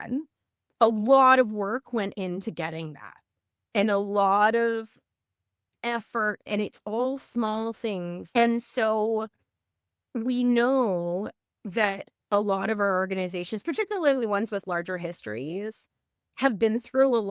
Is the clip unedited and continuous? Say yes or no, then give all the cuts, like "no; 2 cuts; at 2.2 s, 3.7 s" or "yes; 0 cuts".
no; 2 cuts; at 6.5 s, 8.2 s